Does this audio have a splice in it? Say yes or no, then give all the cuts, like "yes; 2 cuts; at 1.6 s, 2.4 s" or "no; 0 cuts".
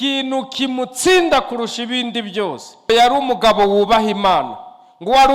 yes; 1 cut; at 2.9 s